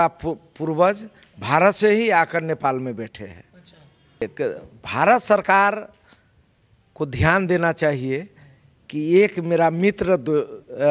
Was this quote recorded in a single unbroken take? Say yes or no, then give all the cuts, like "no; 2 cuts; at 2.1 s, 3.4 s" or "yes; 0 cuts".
no; 1 cut; at 4.2 s